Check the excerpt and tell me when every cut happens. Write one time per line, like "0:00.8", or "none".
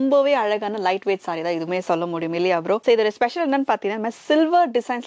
none